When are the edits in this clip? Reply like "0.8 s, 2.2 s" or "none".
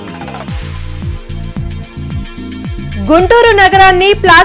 2.6 s